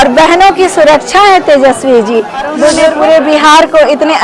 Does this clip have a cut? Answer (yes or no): yes